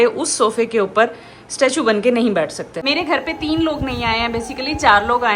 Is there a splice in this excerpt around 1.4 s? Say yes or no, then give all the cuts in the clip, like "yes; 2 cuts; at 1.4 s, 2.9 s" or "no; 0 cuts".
no; 1 cut; at 2.8 s